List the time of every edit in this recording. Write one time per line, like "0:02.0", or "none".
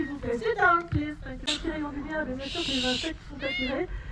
0:01.5